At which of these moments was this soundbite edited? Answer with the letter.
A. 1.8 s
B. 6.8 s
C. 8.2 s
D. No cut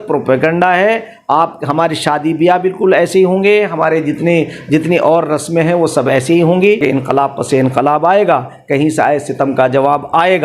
B